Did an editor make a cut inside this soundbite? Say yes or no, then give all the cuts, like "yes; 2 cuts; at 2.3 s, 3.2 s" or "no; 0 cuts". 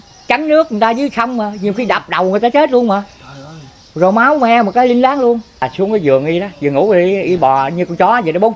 yes; 1 cut; at 5.7 s